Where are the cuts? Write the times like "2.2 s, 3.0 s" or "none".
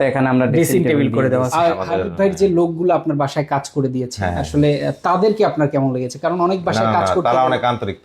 1.5 s

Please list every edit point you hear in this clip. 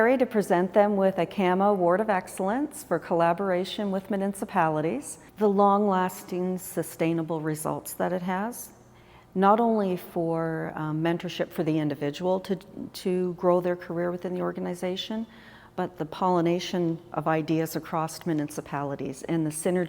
5.2 s

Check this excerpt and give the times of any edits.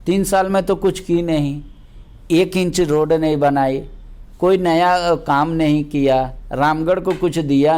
none

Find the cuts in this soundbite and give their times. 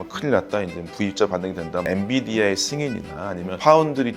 1.8 s

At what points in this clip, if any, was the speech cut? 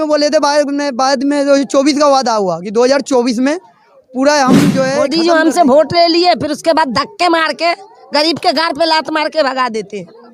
5.1 s

